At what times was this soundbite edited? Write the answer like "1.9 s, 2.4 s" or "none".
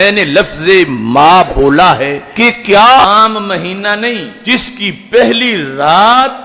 3.0 s

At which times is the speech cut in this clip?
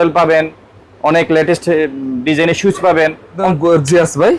3.4 s

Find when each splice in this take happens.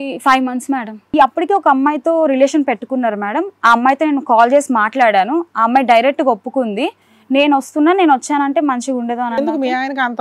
1.1 s

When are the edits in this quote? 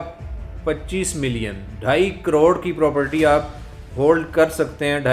none

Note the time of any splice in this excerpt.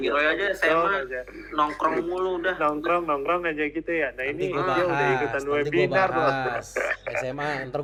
none

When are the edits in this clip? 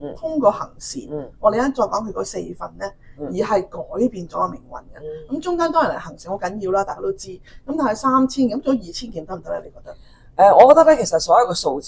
none

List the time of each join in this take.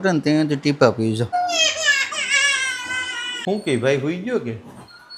1.3 s, 3.4 s

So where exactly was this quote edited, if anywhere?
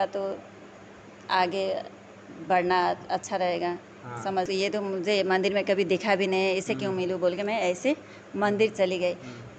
4.4 s

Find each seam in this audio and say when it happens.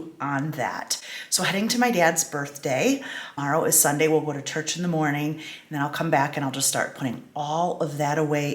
3.2 s

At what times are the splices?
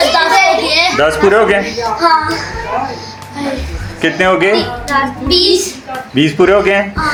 none

